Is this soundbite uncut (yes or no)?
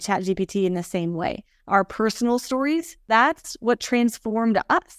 no